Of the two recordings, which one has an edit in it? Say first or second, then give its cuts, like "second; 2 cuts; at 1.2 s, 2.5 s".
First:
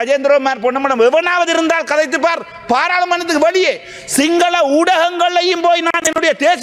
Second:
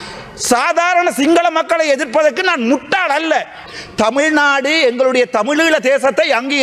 second; 1 cut; at 3.6 s